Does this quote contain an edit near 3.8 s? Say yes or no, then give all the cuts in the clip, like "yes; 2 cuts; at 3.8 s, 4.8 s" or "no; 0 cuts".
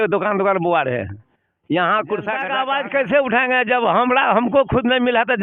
no; 1 cut; at 2.5 s